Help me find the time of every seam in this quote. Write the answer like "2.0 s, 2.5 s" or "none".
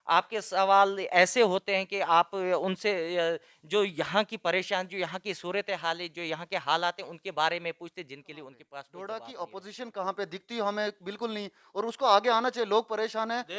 8.6 s

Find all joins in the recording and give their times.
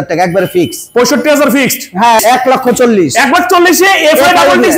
2.2 s

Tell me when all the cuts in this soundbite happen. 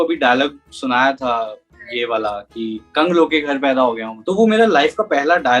4.1 s

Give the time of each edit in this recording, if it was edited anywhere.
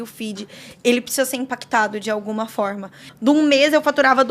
3.1 s

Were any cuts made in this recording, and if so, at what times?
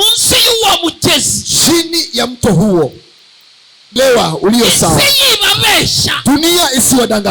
4.0 s

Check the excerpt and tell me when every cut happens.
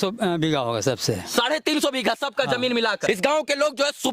3.1 s

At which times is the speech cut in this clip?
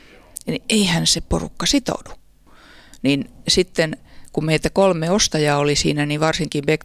2.5 s

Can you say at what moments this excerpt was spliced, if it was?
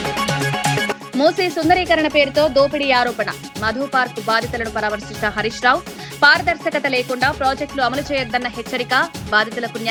none

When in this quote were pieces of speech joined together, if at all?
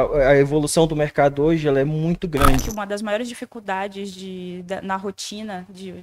2.7 s

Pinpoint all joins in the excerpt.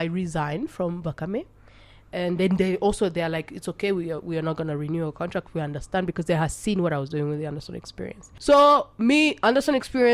8.2 s

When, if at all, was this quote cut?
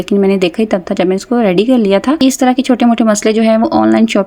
2.2 s

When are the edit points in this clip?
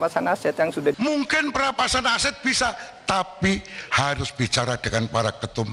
1.0 s

